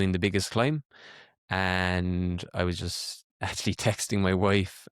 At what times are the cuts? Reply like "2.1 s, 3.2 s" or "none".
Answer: none